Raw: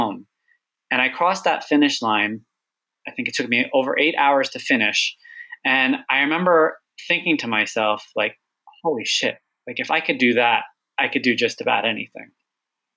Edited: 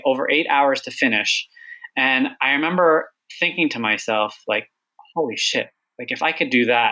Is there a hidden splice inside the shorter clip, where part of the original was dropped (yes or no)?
no